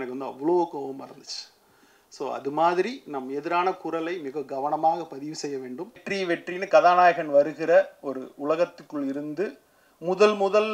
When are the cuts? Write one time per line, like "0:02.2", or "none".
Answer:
0:06.0